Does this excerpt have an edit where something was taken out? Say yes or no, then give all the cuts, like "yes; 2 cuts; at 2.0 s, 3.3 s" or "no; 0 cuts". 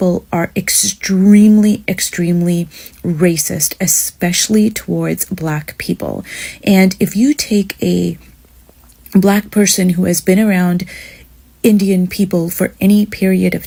no; 0 cuts